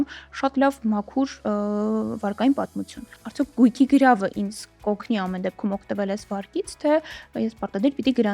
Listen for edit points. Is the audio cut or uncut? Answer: uncut